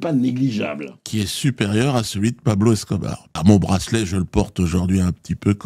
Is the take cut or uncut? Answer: cut